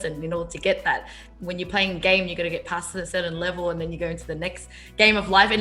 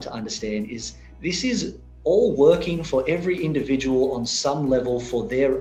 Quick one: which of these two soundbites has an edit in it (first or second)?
first